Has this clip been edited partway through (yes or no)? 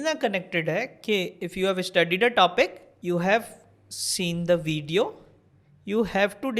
yes